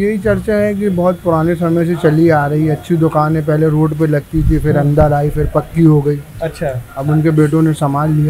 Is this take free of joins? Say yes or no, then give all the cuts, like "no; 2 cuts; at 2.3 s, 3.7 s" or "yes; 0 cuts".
yes; 0 cuts